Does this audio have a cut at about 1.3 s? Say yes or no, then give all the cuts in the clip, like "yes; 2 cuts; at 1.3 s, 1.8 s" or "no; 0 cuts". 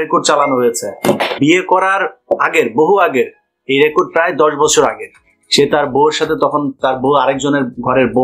yes; 1 cut; at 1.3 s